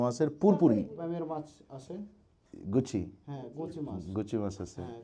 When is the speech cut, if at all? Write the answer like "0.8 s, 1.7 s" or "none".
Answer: 1.0 s